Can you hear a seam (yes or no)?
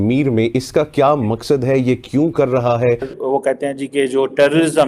yes